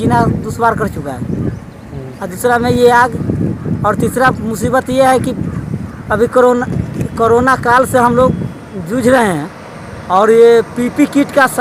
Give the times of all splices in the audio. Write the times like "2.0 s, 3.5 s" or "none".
none